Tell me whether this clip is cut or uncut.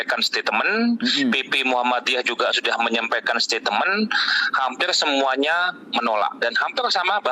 uncut